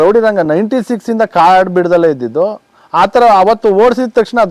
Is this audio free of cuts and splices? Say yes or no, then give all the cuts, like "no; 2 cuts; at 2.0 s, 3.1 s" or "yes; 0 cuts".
yes; 0 cuts